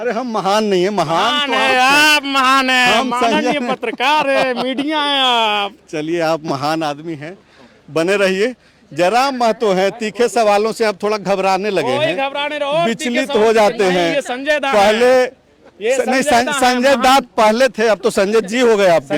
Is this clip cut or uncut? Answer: uncut